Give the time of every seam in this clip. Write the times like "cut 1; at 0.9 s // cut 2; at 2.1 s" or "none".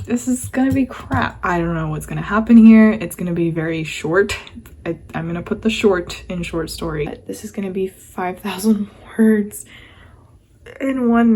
cut 1; at 1.4 s // cut 2; at 7.1 s